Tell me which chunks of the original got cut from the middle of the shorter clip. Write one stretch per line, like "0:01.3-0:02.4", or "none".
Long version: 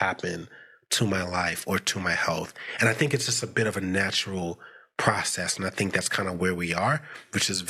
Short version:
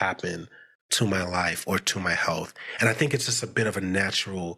none